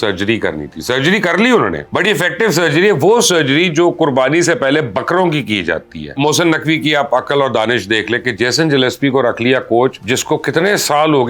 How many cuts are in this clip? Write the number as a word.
three